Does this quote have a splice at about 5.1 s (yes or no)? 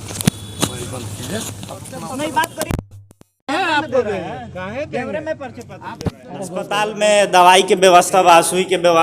no